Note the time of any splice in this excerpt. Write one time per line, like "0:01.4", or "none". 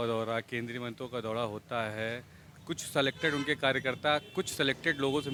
none